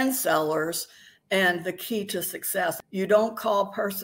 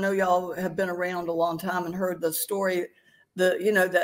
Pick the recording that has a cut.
first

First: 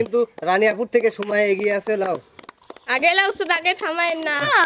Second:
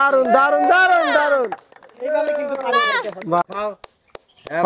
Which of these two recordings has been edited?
second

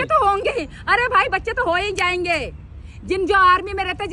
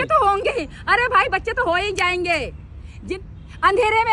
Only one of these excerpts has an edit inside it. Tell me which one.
second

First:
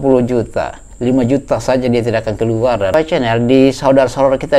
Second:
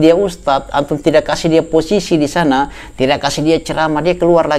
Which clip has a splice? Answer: first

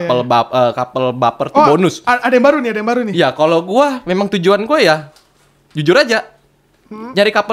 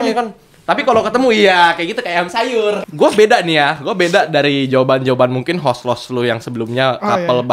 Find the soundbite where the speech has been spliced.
second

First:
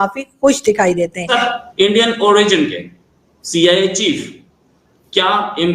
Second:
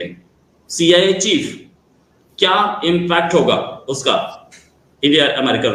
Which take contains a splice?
first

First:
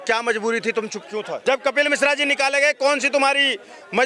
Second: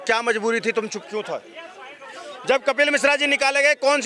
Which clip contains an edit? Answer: first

